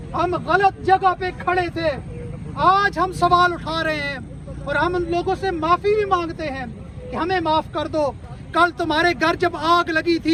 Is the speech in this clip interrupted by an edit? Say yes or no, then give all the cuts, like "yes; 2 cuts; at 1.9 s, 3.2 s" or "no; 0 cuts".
no; 0 cuts